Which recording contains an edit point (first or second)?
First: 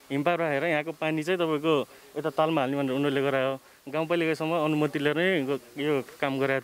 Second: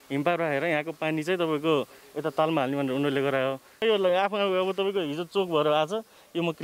second